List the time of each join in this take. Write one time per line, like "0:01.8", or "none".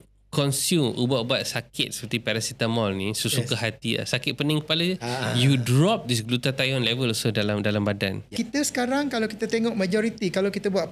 0:08.3